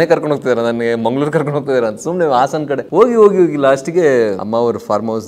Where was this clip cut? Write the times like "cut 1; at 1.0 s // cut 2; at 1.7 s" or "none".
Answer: cut 1; at 2.8 s // cut 2; at 4.4 s